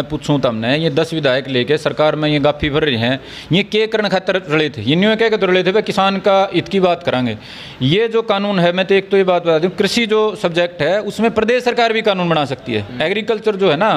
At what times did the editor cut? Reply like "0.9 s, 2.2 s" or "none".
none